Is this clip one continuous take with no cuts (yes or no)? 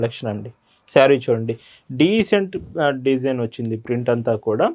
yes